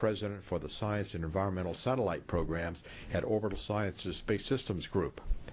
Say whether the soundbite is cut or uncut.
uncut